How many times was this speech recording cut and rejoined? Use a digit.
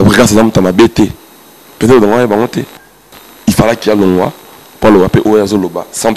0